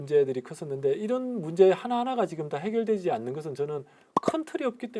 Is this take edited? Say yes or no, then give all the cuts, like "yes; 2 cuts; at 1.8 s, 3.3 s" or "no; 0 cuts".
no; 0 cuts